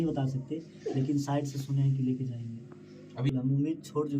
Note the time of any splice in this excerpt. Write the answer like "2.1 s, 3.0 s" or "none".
3.3 s